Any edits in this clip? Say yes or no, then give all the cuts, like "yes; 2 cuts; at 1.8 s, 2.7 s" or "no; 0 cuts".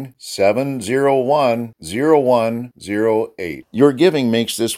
no; 0 cuts